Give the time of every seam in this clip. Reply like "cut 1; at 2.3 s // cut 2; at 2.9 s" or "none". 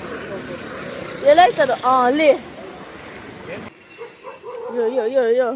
cut 1; at 3.7 s